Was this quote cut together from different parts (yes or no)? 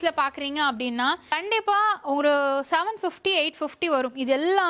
no